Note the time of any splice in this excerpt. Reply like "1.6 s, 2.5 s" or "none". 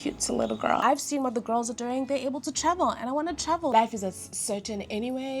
0.8 s, 3.7 s